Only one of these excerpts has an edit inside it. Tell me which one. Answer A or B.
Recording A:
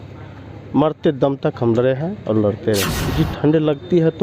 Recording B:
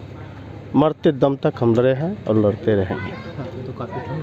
A